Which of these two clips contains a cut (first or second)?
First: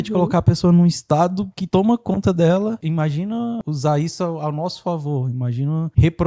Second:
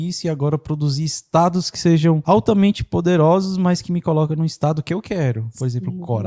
first